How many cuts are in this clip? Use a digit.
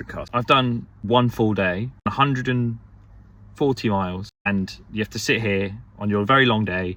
0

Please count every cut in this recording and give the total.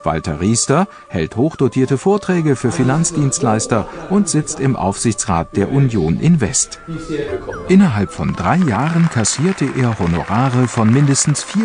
1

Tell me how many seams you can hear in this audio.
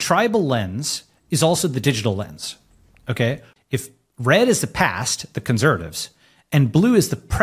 1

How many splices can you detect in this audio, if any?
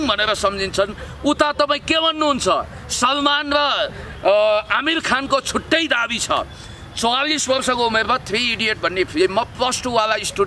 0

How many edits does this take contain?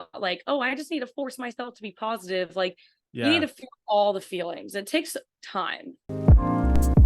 1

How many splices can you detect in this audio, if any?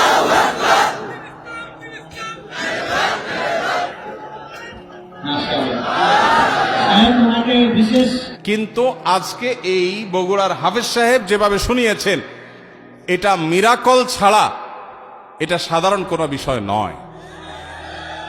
1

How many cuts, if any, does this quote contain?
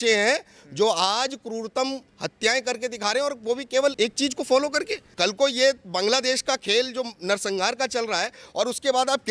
2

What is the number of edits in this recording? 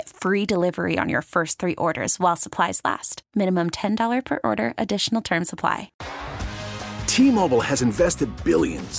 1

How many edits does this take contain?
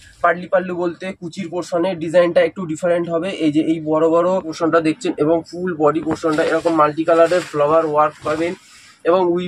1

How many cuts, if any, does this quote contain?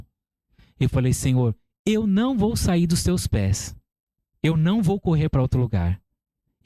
0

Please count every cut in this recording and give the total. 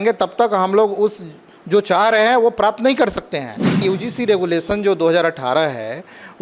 1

